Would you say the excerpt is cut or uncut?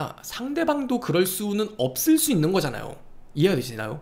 uncut